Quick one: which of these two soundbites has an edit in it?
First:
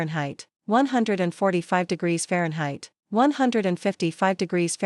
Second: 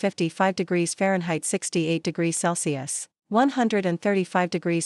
first; 1 cut; at 2.9 s

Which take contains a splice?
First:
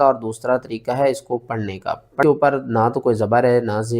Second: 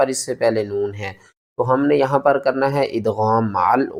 first; 1 cut; at 2.2 s

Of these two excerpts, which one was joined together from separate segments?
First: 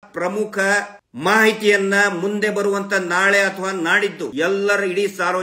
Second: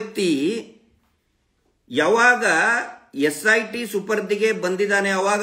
first; 2 cuts; at 1.0 s, 4.3 s

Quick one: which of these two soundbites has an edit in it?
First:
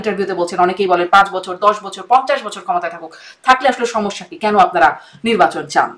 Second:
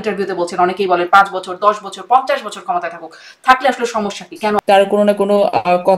second; 1 cut; at 4.6 s

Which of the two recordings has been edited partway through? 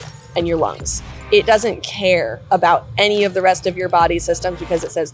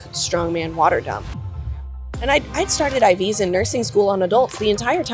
second; 1 cut; at 1.7 s

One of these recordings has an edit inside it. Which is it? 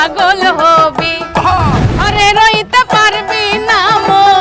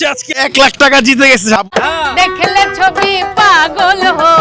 second; 1 cut; at 1.7 s

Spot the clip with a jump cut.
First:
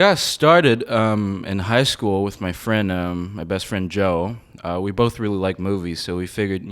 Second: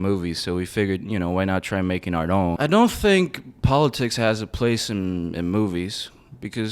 second; 1 cut; at 2.6 s

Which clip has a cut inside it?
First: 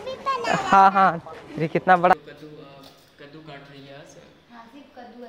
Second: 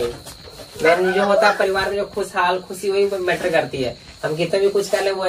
first; 1 cut; at 2.1 s

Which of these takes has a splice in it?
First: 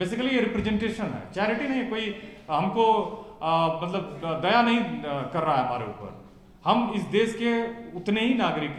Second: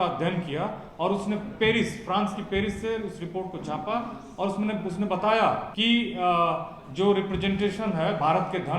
second; 1 cut; at 5.7 s

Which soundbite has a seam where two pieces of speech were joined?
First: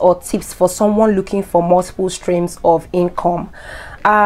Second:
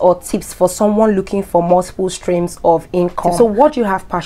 second; 1 cut; at 3.3 s

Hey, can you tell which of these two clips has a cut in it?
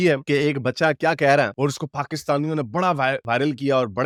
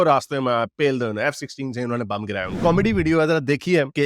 second; 1 cut; at 2.6 s

